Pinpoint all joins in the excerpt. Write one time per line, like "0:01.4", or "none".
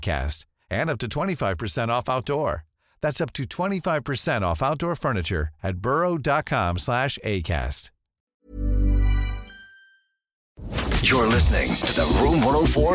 0:10.8